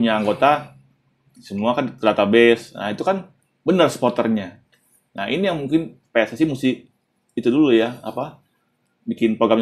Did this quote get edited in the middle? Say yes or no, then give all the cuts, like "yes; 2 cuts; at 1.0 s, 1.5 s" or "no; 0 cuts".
no; 0 cuts